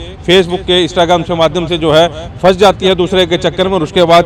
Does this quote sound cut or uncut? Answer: uncut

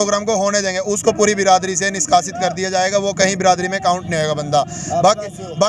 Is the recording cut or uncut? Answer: uncut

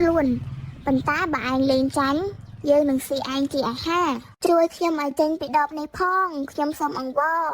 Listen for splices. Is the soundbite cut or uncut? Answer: cut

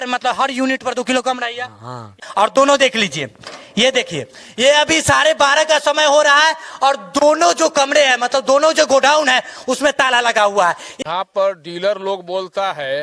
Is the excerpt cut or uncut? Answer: cut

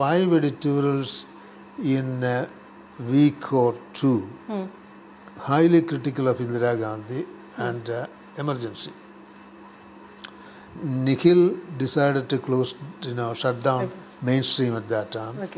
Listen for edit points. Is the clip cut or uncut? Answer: uncut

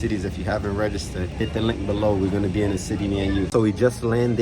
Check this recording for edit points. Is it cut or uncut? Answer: cut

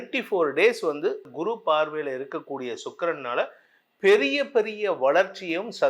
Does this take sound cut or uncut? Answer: cut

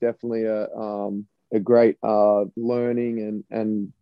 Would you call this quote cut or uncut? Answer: cut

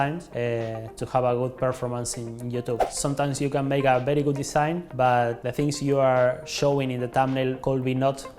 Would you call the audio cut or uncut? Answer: cut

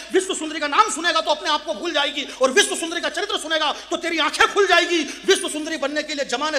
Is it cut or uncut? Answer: uncut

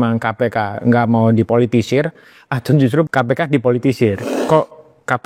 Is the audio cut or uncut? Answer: cut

